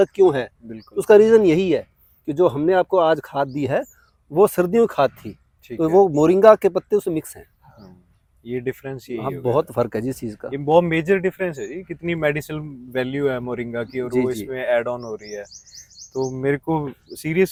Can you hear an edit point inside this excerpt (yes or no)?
no